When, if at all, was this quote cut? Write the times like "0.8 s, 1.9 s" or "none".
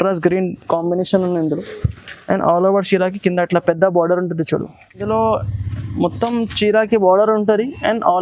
5.0 s